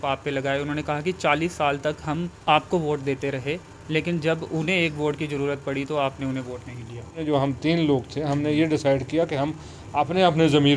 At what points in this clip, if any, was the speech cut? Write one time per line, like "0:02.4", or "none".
0:02.3
0:07.2